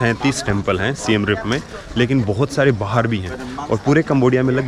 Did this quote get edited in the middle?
no; 0 cuts

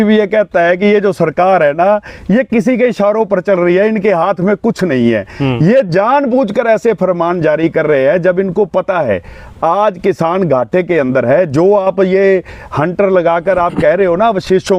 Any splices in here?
no; 0 cuts

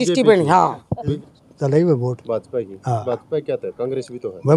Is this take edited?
yes; 1 cut; at 1.2 s

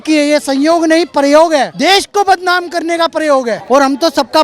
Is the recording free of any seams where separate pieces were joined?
no; 2 cuts; at 1.7 s, 3.6 s

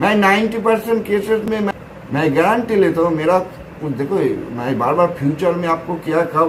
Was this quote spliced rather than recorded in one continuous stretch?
no; 0 cuts

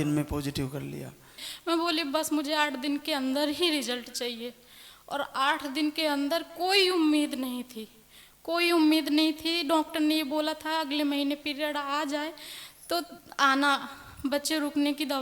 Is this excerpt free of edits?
no; 1 cut; at 1.4 s

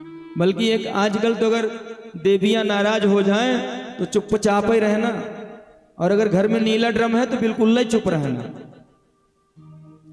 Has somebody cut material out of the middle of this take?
no; 0 cuts

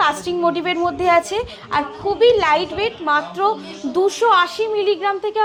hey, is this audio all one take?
yes; 0 cuts

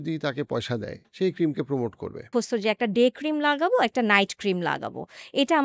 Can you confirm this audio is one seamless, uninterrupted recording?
no; 2 cuts; at 1.0 s, 2.3 s

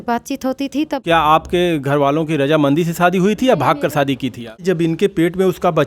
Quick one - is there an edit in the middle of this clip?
yes; 2 cuts; at 1.0 s, 4.6 s

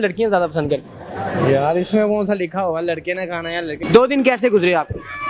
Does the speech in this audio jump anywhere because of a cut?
yes; 1 cut; at 3.7 s

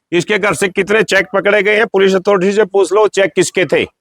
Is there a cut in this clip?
no; 0 cuts

